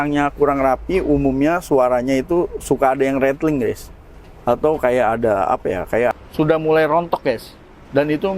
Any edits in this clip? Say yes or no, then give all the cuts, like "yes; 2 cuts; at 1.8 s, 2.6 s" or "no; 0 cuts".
yes; 1 cut; at 6.1 s